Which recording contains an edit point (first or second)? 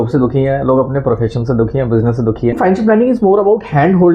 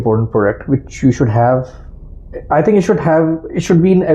first